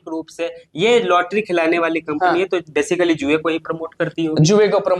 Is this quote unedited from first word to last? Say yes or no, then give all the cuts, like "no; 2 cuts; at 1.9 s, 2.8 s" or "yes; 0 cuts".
yes; 0 cuts